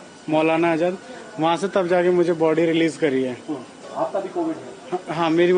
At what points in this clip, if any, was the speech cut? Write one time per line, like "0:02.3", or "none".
0:03.8

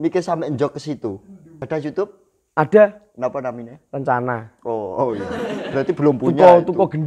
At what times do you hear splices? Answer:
0:01.6

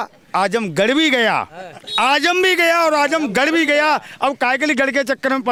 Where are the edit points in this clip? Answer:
none

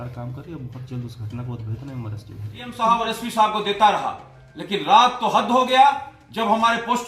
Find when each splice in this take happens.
0:02.7

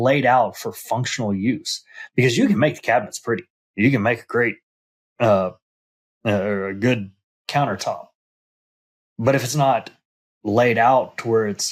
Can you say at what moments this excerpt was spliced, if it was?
none

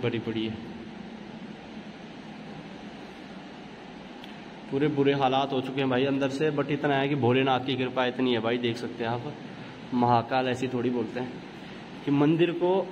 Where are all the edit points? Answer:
none

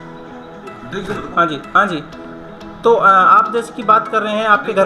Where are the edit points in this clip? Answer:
none

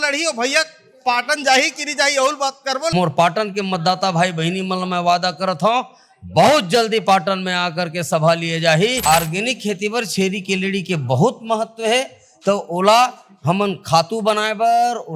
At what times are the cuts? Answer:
0:02.9
0:09.0

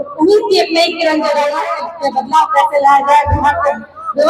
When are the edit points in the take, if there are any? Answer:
0:01.8

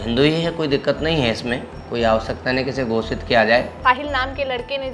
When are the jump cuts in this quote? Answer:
0:01.7
0:03.7

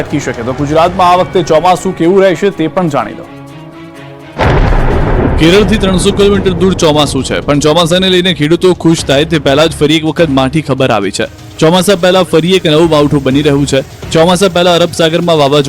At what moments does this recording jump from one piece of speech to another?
none

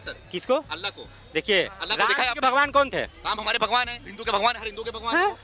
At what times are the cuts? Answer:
none

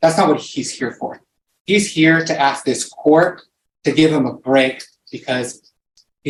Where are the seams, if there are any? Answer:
none

